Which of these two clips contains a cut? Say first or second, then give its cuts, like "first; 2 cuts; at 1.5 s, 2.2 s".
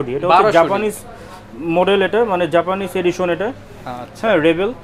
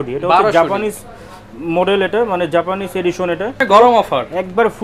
second; 1 cut; at 3.6 s